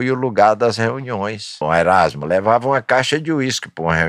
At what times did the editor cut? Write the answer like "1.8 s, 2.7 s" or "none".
1.6 s